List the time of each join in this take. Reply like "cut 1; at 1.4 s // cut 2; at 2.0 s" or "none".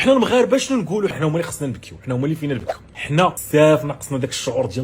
cut 1; at 1.2 s // cut 2; at 3.1 s

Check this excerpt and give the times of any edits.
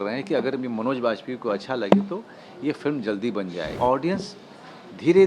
cut 1; at 3.7 s

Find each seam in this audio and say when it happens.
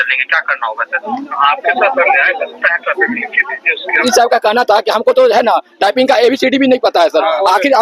cut 1; at 4.0 s

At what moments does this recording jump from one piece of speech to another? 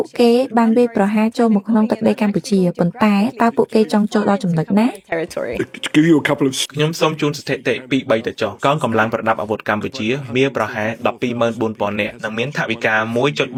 none

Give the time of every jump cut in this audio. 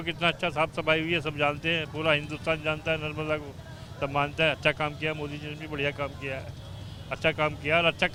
none

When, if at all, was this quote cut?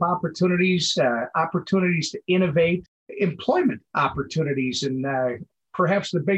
none

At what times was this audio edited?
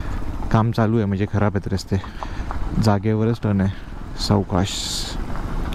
cut 1; at 2.2 s

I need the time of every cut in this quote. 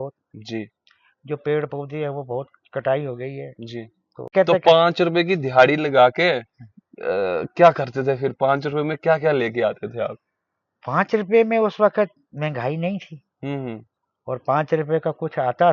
cut 1; at 4.3 s

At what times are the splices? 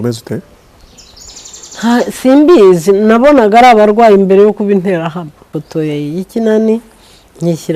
cut 1; at 5.4 s

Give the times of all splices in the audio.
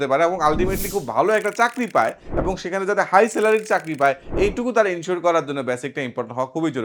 none

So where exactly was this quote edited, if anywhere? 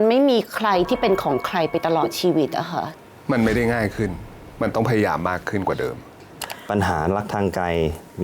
cut 1; at 2.9 s // cut 2; at 6.2 s

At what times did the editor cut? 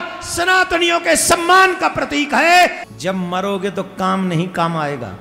cut 1; at 2.8 s

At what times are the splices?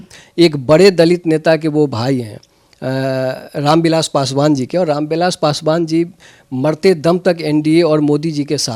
none

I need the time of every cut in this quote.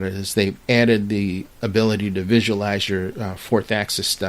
cut 1; at 1.5 s

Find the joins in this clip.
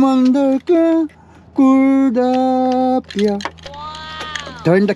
none

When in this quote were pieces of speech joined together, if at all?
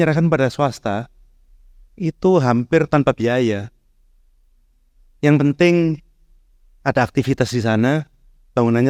none

